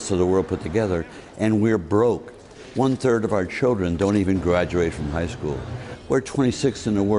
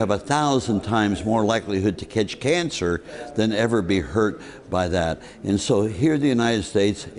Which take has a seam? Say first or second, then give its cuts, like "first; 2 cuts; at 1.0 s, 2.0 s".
first; 1 cut; at 4.2 s